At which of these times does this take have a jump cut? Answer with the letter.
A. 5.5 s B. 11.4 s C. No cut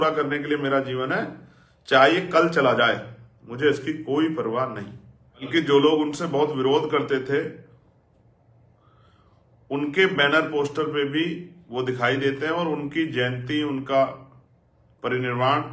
A